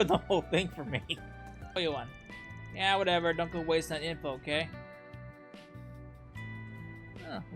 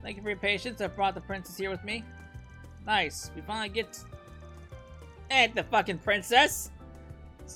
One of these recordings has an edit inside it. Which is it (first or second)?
first